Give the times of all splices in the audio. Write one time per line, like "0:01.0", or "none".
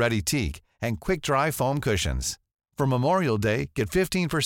none